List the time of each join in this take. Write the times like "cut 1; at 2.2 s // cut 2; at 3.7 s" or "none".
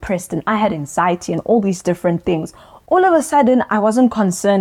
cut 1; at 2.7 s